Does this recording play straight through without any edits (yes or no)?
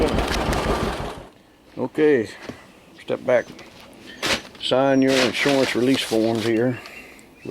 no